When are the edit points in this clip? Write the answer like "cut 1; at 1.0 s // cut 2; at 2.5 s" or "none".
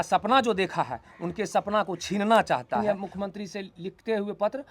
cut 1; at 2.8 s